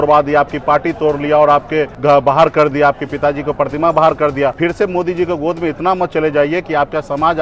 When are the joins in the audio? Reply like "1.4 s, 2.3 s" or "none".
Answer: 1.9 s, 4.6 s